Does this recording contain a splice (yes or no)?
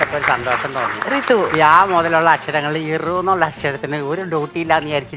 no